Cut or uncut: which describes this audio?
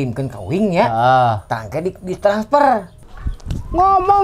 cut